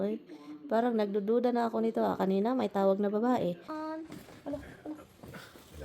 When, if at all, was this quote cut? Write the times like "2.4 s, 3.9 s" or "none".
3.7 s